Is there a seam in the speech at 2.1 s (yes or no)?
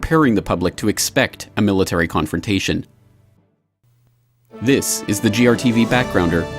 yes